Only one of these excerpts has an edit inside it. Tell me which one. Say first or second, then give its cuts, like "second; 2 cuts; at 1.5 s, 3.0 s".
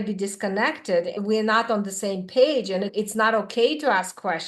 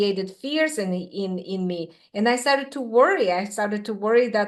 first; 2 cuts; at 1.2 s, 2.9 s